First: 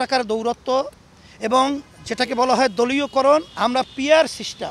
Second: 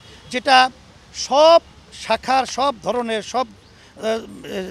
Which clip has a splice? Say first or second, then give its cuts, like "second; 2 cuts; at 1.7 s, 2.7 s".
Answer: first; 1 cut; at 3.5 s